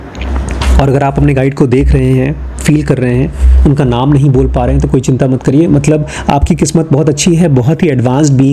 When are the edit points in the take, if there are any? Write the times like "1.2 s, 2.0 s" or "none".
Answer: none